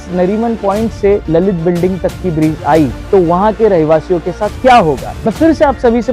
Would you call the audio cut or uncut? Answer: cut